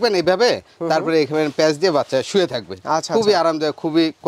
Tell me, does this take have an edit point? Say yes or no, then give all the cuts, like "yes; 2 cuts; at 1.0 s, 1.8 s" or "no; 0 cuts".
no; 0 cuts